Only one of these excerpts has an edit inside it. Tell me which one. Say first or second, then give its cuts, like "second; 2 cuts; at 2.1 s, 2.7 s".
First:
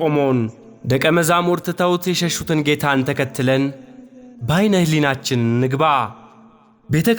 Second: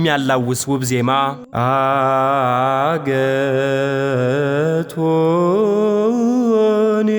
second; 1 cut; at 1.4 s